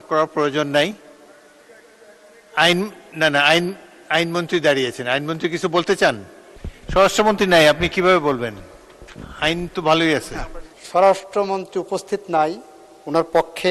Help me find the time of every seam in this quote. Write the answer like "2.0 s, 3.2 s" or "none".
none